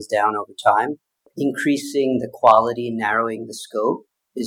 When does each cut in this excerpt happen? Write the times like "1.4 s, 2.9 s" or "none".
1.3 s